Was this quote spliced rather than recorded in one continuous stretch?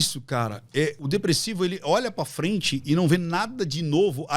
yes; 1 cut; at 1.0 s

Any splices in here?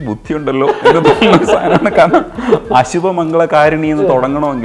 no; 0 cuts

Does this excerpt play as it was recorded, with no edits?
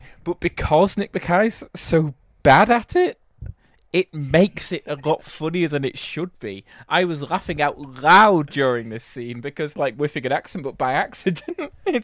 no; 1 cut; at 9.7 s

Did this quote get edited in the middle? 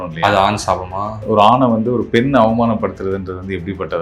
yes; 1 cut; at 1.2 s

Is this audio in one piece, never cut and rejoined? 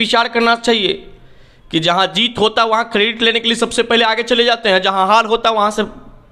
yes; 0 cuts

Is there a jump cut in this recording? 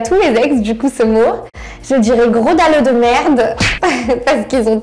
yes; 1 cut; at 1.6 s

